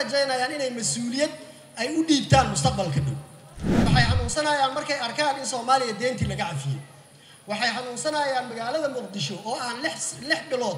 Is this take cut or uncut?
cut